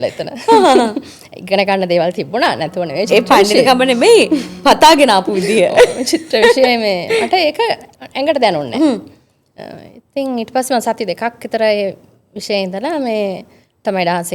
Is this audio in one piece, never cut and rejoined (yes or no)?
yes